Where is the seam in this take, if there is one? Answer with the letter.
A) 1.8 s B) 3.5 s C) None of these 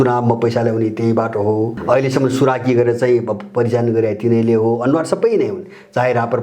A